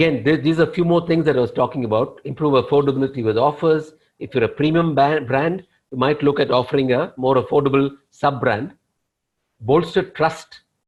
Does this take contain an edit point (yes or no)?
no